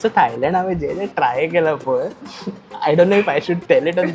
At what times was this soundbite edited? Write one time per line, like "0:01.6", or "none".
none